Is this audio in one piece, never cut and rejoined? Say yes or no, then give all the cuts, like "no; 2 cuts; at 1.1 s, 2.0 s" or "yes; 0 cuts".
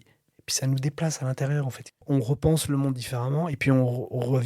no; 1 cut; at 1.8 s